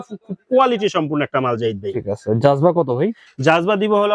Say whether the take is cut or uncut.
uncut